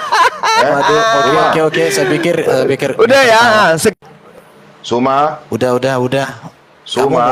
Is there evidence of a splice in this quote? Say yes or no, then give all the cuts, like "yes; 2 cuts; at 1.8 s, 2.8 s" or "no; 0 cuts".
no; 0 cuts